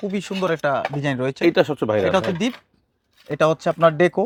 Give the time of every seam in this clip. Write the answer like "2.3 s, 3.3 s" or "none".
none